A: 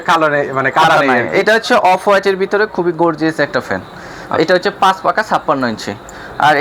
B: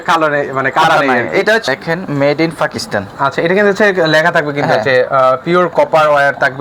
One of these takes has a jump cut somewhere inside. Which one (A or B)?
B